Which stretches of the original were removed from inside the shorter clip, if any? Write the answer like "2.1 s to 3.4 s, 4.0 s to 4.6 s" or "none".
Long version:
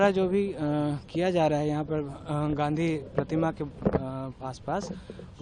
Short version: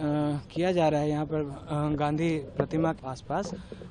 3.6 s to 4.4 s